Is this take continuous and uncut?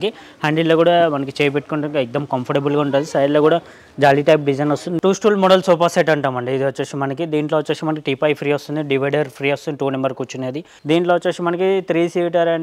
no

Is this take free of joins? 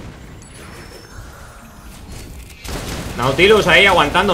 no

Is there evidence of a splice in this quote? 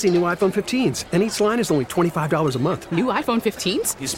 no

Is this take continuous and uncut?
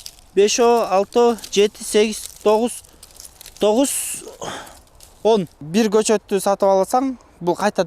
no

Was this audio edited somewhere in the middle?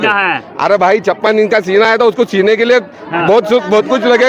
no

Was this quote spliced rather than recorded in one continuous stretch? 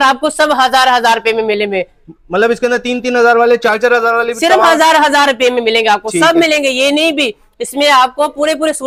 no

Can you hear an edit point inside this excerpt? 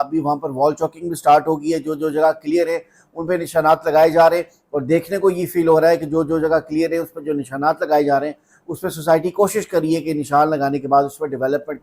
no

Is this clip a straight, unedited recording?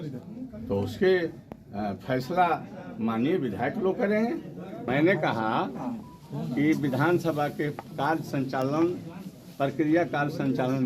no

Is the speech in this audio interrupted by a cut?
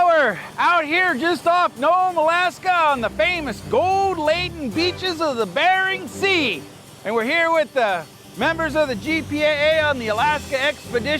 no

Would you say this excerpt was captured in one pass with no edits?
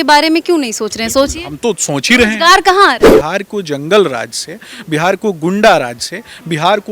no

